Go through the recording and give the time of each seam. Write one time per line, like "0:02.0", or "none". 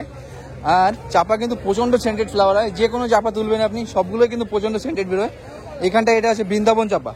none